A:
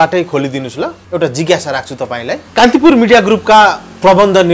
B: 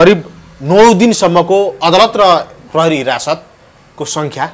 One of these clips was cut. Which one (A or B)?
A